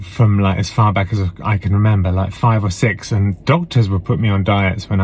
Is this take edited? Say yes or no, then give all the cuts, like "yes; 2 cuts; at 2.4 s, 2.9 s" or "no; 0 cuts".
no; 0 cuts